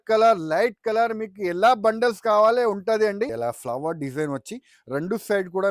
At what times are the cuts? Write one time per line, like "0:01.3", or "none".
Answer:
0:03.3